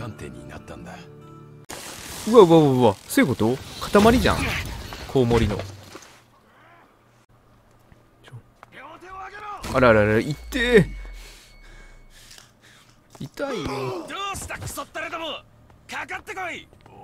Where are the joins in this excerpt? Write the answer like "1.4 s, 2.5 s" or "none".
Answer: 1.7 s, 7.3 s